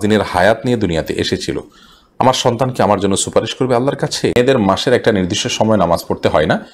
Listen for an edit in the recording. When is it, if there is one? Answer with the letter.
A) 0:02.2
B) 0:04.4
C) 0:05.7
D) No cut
B